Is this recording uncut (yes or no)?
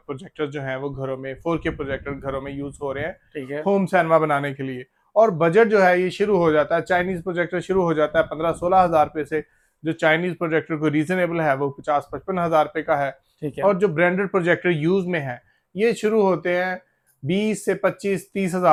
yes